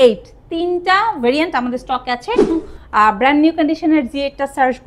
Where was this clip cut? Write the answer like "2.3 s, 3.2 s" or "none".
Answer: 2.5 s